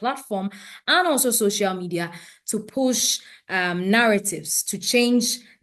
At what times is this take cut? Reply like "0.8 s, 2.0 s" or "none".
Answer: none